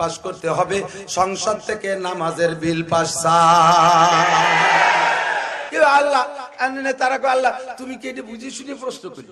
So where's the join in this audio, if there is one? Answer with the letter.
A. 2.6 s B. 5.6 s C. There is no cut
B